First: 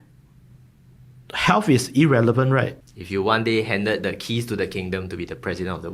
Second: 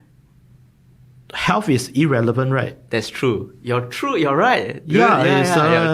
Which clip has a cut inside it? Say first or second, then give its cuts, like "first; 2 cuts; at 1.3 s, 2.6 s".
first; 1 cut; at 2.8 s